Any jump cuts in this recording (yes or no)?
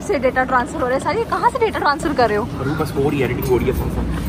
no